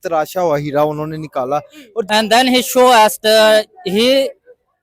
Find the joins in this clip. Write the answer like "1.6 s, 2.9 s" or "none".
2.1 s